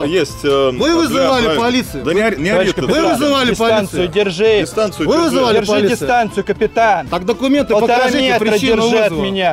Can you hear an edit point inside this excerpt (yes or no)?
no